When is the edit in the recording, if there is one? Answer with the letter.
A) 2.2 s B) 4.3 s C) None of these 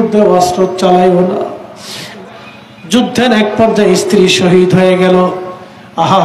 A